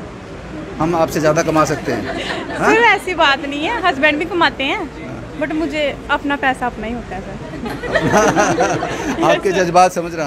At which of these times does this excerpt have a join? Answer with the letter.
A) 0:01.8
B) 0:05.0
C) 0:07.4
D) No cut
D